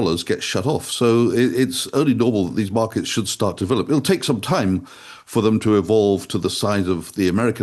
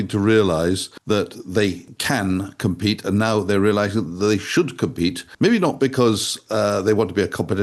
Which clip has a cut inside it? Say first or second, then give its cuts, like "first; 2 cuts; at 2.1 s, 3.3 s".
second; 3 cuts; at 0.9 s, 1.9 s, 5.3 s